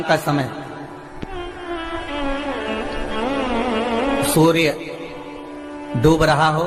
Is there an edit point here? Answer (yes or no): no